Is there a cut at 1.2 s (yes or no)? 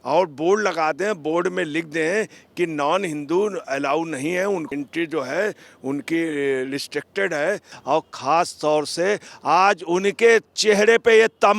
no